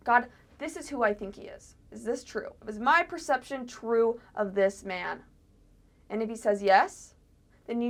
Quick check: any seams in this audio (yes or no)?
no